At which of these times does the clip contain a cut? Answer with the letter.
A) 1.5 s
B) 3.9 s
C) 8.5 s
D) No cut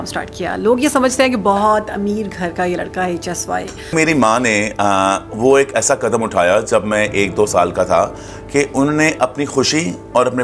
B